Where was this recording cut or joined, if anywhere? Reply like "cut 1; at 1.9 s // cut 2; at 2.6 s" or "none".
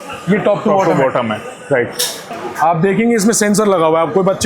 cut 1; at 2.3 s

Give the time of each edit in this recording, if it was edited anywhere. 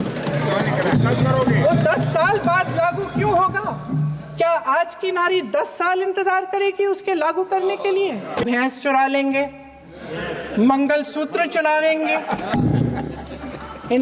cut 1; at 8.4 s

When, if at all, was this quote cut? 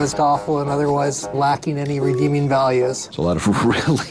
cut 1; at 3.0 s

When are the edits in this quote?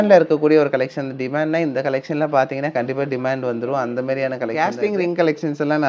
cut 1; at 4.6 s

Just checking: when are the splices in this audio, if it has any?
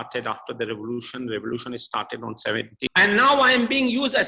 cut 1; at 2.9 s

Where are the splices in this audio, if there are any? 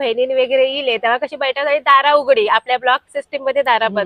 none

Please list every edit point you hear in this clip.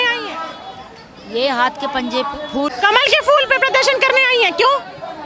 cut 1; at 2.7 s

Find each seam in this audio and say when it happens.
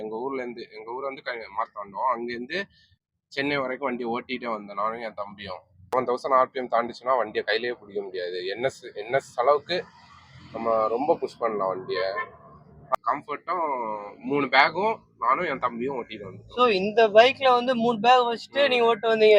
cut 1; at 5.9 s // cut 2; at 13.0 s

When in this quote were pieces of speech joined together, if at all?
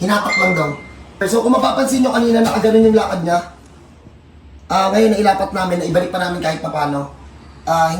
cut 1; at 1.2 s

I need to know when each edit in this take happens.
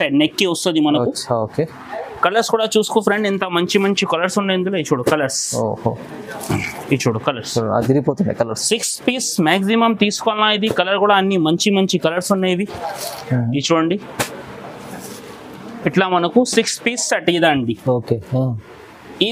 none

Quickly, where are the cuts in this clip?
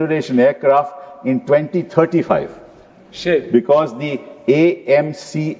none

